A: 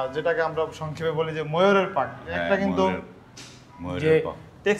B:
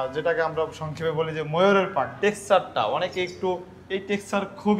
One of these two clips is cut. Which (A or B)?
B